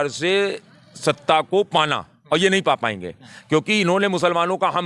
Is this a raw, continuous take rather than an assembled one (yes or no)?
yes